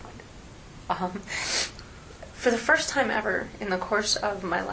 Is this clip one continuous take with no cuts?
no; 1 cut; at 1.7 s

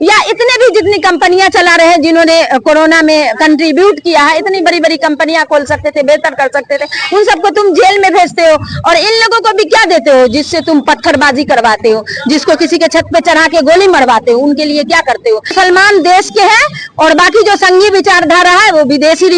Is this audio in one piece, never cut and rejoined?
no; 1 cut; at 15.5 s

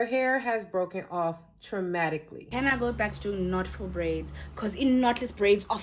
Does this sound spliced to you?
yes; 1 cut; at 2.5 s

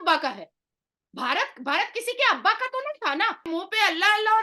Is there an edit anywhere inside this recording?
yes; 1 cut; at 3.4 s

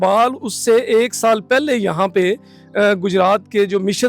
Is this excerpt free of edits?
yes; 0 cuts

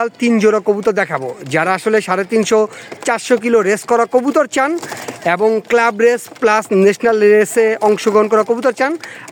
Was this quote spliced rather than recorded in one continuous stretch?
no; 0 cuts

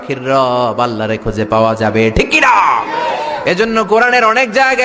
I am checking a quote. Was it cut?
no; 0 cuts

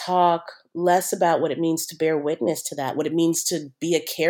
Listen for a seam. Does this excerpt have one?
no; 0 cuts

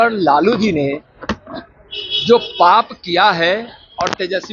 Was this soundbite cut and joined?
no; 0 cuts

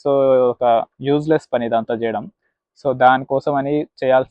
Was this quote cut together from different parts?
no; 0 cuts

